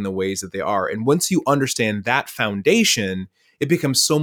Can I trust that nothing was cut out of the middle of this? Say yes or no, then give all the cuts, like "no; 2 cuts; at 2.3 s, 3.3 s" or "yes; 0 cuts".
yes; 0 cuts